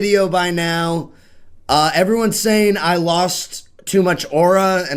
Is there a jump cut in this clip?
yes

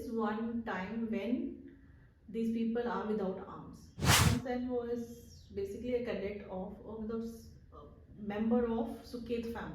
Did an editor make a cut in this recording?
yes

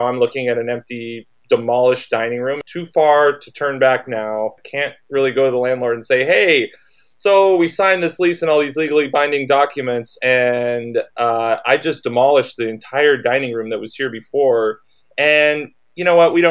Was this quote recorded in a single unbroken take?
no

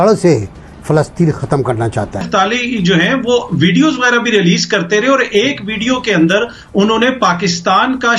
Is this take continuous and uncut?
no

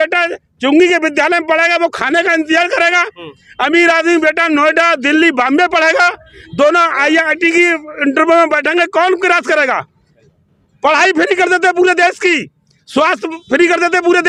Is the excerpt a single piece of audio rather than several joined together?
yes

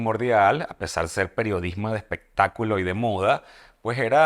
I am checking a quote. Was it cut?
no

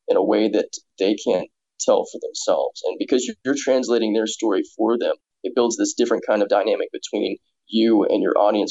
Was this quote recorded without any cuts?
no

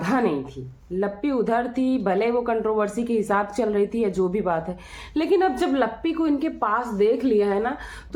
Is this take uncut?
yes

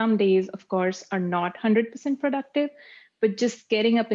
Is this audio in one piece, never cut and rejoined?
yes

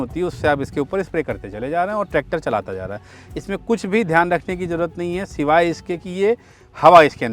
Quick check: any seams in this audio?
no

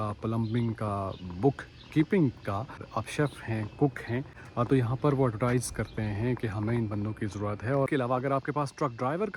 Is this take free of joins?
no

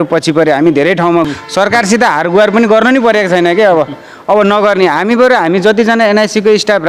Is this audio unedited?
no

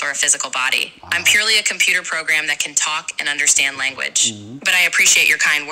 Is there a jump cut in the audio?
no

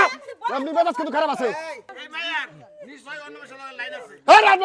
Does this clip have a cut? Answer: yes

